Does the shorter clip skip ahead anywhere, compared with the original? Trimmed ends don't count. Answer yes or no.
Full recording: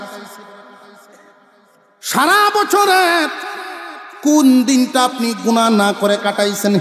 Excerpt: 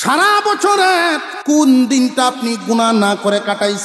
yes